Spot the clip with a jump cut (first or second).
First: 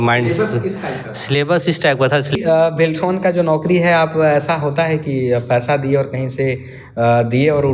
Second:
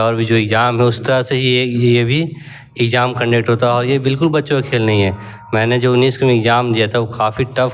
first